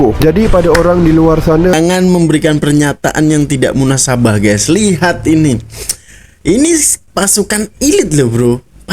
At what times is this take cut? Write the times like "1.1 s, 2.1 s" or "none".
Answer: 1.7 s